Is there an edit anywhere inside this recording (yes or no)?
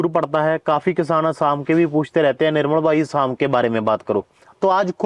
no